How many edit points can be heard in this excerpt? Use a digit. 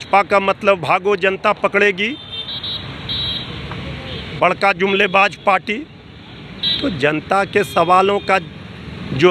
0